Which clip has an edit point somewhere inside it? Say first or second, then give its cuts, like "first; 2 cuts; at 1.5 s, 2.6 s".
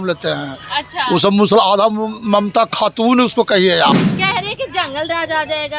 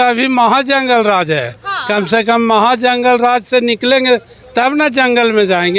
first; 1 cut; at 3.9 s